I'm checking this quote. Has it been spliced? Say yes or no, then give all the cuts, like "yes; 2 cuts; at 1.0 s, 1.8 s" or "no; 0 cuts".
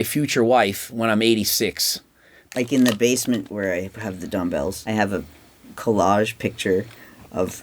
yes; 3 cuts; at 2.5 s, 3.5 s, 4.8 s